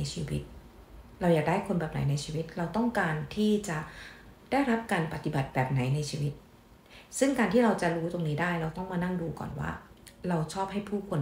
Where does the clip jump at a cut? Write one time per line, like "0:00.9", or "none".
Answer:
none